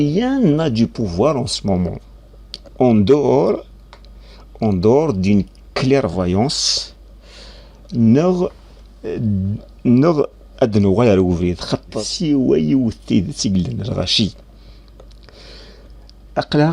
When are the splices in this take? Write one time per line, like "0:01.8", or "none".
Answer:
0:11.9